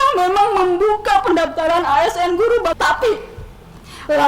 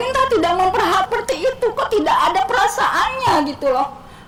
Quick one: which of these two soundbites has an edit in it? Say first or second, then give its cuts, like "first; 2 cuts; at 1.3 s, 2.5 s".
first; 1 cut; at 2.8 s